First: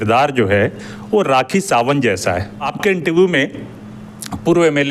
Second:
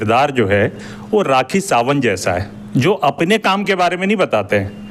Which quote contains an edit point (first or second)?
first